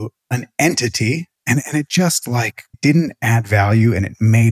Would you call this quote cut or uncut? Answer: cut